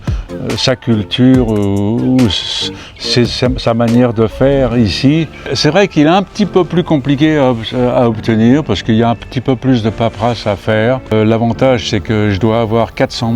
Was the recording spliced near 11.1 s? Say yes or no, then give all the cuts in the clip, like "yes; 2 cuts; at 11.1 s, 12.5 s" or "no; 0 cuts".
yes; 2 cuts; at 5.4 s, 11.1 s